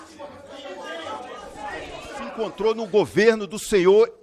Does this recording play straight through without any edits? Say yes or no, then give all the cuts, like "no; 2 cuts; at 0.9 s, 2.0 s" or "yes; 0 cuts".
no; 1 cut; at 2.5 s